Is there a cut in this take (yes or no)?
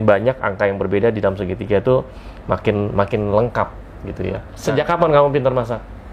yes